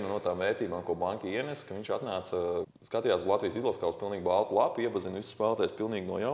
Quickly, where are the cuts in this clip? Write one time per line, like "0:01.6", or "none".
0:02.8

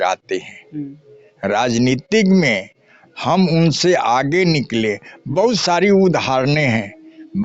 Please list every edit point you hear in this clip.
none

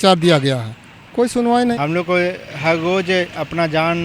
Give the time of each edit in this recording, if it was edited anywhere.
0:01.8

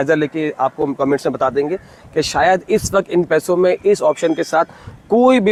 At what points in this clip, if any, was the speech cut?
none

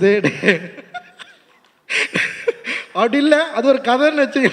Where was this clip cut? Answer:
none

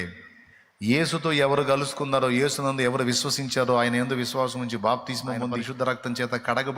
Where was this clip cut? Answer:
0:05.7

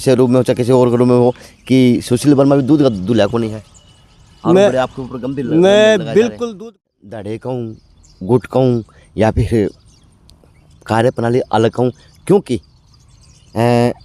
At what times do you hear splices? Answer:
0:06.4

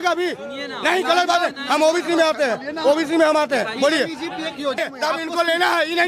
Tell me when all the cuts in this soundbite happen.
0:04.8

